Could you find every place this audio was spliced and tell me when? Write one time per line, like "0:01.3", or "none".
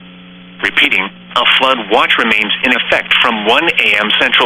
none